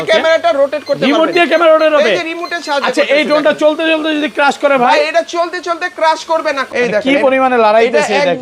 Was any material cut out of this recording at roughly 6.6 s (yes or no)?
yes